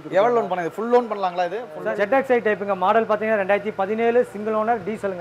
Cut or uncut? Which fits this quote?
cut